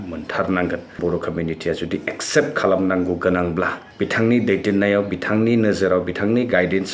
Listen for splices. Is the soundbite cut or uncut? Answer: cut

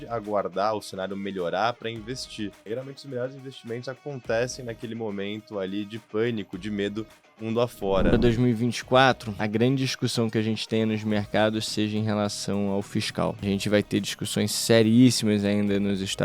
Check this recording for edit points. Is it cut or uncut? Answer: cut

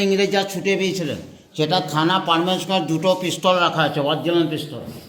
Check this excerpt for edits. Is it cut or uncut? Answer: uncut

